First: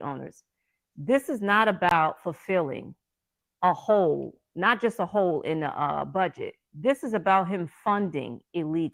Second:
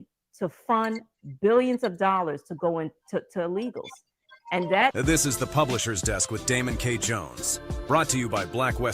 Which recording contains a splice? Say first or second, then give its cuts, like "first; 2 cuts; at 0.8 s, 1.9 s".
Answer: second; 1 cut; at 4.9 s